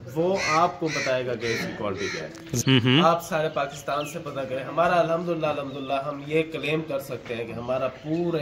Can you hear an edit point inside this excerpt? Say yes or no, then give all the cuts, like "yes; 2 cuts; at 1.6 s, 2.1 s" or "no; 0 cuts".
yes; 1 cut; at 2.5 s